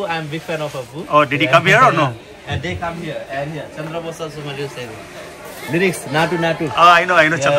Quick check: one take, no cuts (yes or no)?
yes